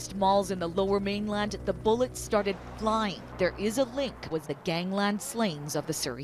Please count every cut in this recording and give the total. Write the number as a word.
two